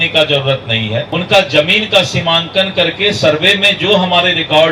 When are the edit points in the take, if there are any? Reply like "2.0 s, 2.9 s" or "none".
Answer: 1.1 s